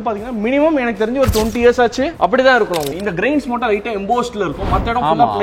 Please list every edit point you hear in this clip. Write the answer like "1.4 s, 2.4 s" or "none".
2.9 s